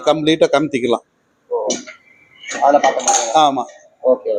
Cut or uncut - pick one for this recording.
uncut